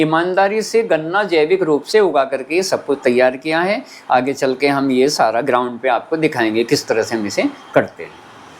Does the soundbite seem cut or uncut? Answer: uncut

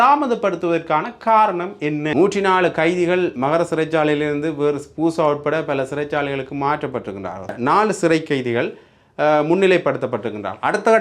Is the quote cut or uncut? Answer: cut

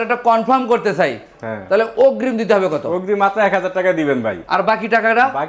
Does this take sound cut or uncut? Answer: uncut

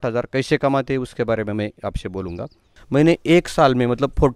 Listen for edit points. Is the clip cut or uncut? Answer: cut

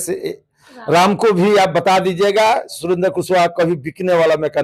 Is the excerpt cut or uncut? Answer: uncut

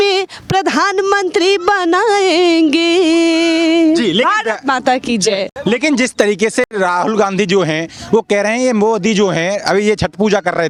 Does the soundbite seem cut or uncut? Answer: uncut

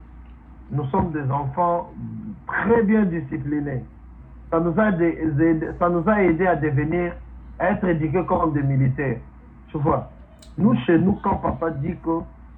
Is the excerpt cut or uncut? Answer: uncut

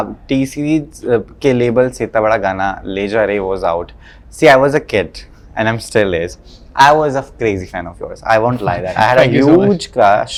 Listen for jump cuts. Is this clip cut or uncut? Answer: uncut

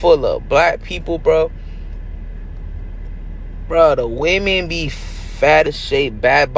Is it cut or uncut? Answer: cut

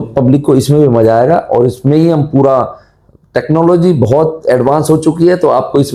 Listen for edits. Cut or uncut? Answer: uncut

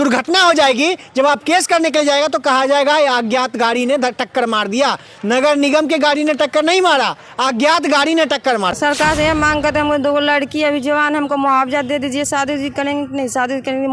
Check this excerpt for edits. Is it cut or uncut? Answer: cut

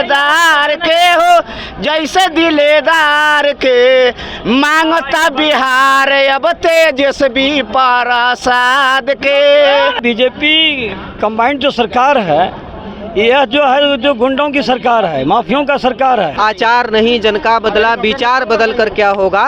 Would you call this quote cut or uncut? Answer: cut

